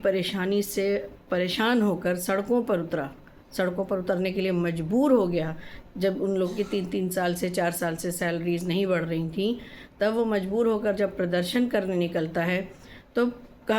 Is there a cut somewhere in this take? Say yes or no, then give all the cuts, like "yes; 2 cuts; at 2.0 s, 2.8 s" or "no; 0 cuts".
no; 0 cuts